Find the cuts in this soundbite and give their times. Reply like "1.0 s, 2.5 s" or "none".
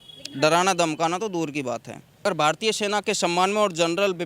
2.0 s